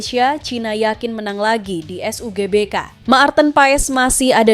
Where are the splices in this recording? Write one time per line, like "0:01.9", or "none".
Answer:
0:02.9